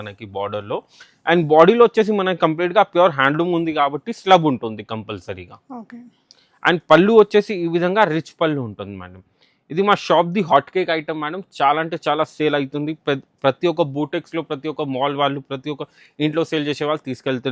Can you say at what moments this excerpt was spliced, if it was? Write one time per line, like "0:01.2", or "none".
none